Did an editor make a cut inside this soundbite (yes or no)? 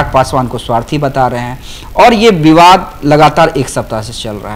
no